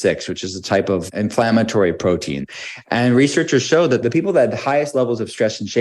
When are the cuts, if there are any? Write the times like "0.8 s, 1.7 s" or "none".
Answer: 1.0 s, 2.4 s, 4.0 s